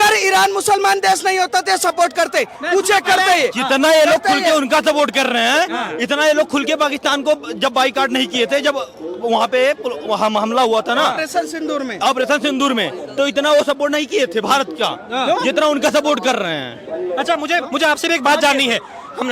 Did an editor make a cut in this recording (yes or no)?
no